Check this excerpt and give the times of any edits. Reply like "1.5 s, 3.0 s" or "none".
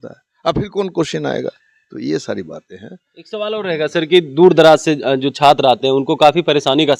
none